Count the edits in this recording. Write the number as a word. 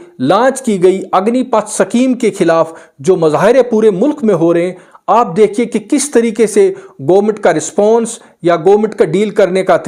zero